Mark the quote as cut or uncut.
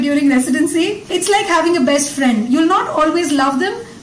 cut